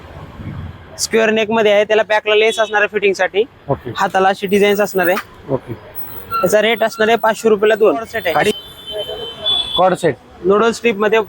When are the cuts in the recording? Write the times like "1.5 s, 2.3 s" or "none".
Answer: 8.5 s